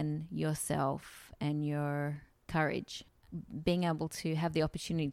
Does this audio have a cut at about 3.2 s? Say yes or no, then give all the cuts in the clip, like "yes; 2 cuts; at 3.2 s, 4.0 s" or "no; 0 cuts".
yes; 2 cuts; at 2.3 s, 3.2 s